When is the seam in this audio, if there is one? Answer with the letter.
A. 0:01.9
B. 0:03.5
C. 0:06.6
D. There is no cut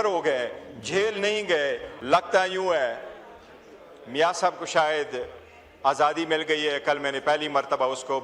A